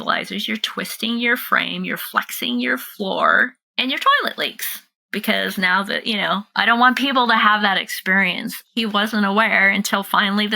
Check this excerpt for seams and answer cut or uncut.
cut